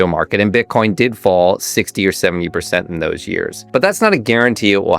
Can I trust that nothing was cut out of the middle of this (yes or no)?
no